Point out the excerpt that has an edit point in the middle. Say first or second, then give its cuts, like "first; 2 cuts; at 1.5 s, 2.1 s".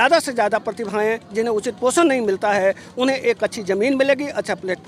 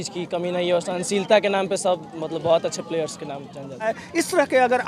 second; 1 cut; at 3.9 s